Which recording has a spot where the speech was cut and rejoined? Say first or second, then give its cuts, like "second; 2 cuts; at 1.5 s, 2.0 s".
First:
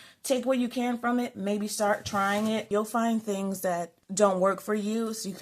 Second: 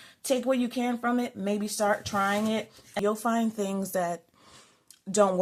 first; 2 cuts; at 2.7 s, 4.0 s